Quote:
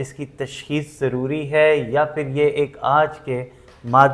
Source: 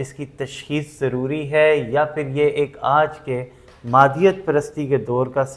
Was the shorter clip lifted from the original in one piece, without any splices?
yes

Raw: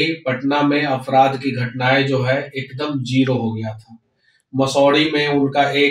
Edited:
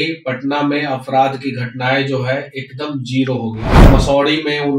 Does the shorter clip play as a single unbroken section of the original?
no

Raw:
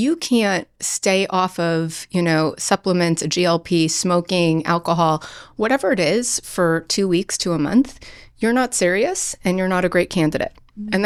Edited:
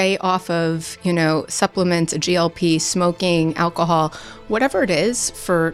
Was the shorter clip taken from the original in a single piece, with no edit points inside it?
yes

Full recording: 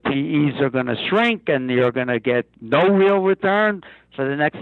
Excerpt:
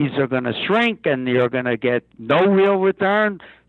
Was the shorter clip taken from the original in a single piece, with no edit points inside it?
yes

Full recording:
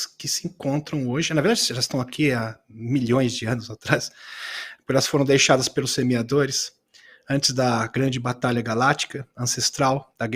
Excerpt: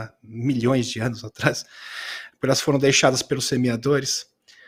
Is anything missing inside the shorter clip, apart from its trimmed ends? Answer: no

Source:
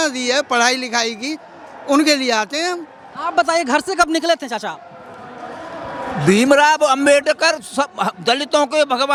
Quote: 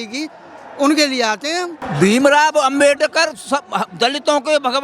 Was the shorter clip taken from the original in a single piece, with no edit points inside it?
no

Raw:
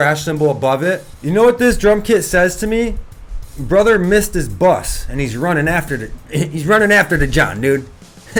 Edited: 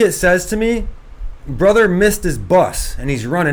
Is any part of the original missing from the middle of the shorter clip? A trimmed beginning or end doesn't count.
no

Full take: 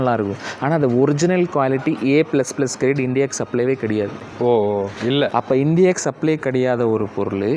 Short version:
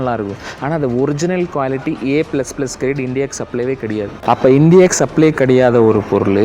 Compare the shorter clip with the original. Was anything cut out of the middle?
yes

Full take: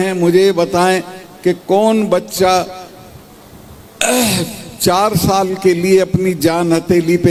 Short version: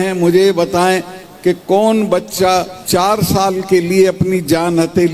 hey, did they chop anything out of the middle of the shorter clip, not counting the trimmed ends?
yes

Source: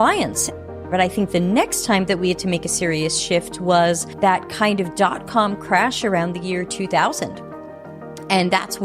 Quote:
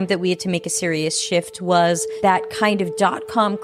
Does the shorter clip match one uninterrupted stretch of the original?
yes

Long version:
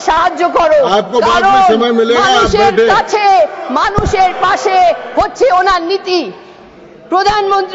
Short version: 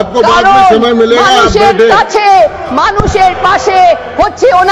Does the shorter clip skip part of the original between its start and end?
no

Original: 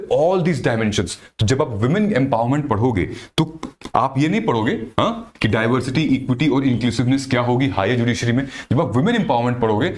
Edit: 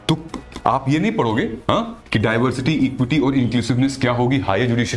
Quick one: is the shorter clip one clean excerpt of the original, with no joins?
yes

